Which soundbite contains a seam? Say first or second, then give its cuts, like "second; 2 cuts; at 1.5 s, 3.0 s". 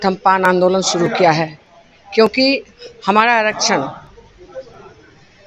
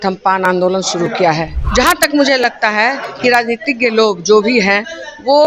second; 1 cut; at 1.5 s